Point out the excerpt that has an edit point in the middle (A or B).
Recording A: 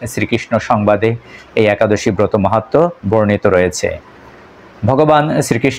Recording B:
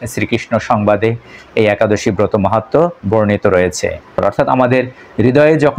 B